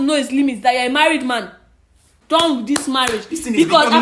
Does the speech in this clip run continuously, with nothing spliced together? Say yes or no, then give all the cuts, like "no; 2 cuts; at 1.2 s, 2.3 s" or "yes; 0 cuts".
no; 1 cut; at 2.1 s